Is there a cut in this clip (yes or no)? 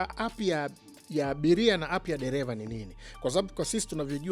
no